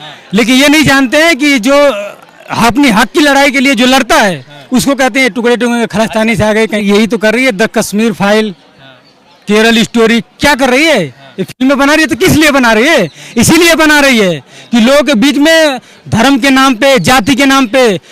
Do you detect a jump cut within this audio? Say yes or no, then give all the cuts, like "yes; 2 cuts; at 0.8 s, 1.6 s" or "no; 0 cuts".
yes; 1 cut; at 6.8 s